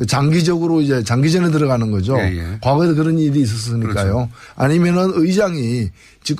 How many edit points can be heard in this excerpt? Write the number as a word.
one